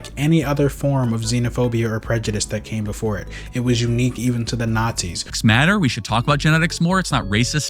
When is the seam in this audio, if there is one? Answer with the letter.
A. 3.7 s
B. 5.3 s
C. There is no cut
B